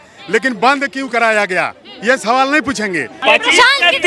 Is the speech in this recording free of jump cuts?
no; 1 cut; at 3.2 s

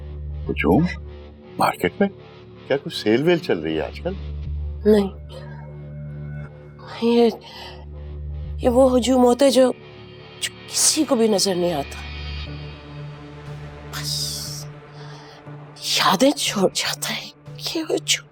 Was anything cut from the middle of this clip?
no; 0 cuts

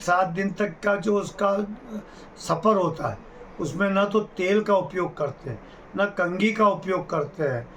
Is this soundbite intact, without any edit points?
yes; 0 cuts

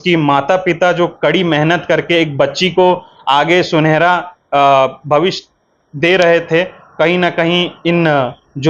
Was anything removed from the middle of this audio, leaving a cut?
no; 0 cuts

